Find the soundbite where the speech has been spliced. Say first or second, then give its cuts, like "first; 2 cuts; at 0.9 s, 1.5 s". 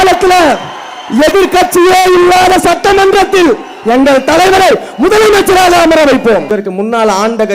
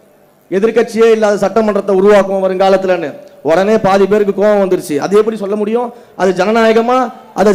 first; 1 cut; at 6.5 s